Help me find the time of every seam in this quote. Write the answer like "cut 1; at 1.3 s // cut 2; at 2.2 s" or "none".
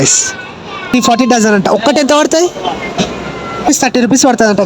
cut 1; at 0.9 s // cut 2; at 3.7 s